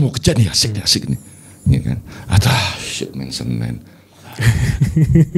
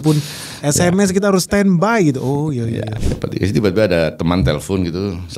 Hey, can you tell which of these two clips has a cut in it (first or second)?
second